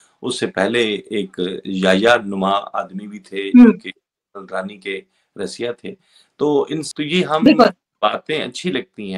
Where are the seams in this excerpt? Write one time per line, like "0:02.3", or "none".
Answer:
0:06.9

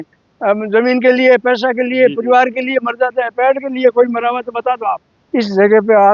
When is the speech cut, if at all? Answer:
0:05.1

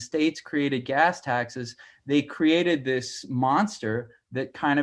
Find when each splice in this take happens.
none

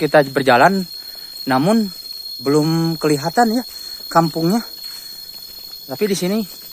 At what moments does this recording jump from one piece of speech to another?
none

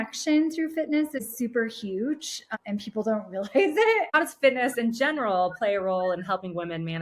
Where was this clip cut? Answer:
0:01.2
0:02.5
0:04.1

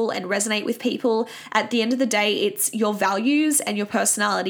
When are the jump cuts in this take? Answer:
none

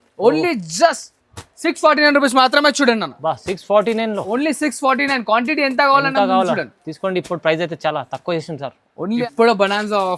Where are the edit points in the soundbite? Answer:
0:09.2

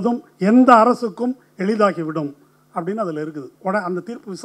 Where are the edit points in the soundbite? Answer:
0:03.5

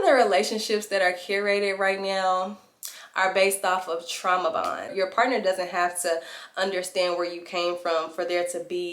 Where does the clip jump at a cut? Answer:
0:04.9

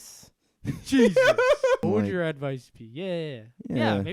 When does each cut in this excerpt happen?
0:01.8

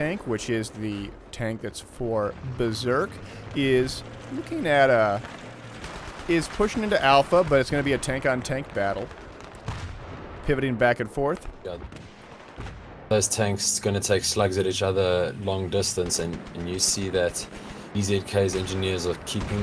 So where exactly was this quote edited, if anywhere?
none

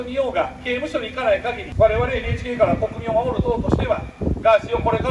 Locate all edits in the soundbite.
0:01.6

